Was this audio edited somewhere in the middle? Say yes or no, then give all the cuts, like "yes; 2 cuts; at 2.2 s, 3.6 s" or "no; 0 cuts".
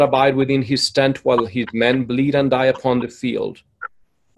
no; 0 cuts